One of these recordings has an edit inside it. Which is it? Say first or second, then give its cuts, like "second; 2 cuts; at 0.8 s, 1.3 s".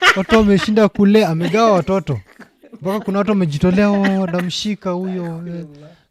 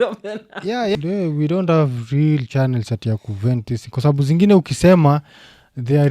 second; 1 cut; at 1.0 s